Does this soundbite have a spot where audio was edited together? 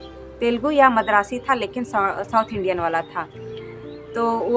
no; 0 cuts

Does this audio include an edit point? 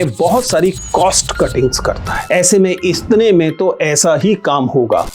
yes; 1 cut; at 2.1 s

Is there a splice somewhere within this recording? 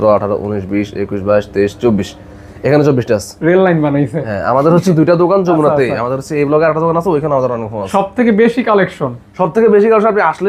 no; 0 cuts

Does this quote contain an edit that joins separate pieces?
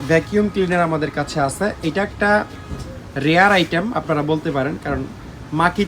no; 0 cuts

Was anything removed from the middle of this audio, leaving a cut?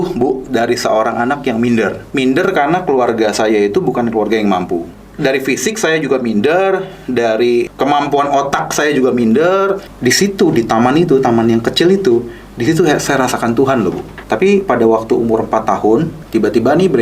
yes; 6 cuts; at 2.0 s, 5.0 s, 7.7 s, 9.9 s, 14.1 s, 16.2 s

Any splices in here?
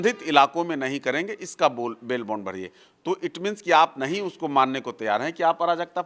no; 0 cuts

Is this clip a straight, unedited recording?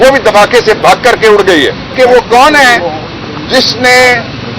no; 1 cut; at 1.9 s

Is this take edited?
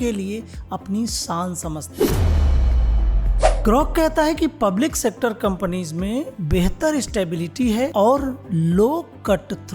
no; 0 cuts

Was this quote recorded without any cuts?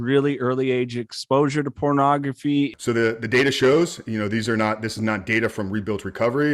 no; 1 cut; at 2.7 s

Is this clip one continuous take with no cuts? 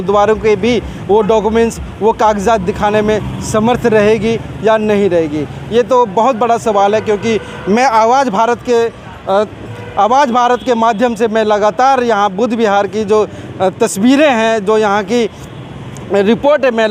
yes; 0 cuts

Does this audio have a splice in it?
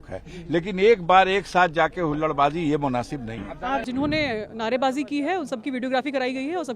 yes; 1 cut; at 3.8 s

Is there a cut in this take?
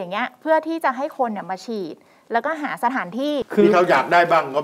yes; 1 cut; at 3.4 s

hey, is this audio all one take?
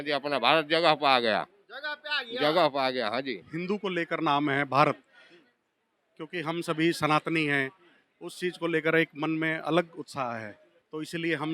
no; 1 cut; at 3.4 s

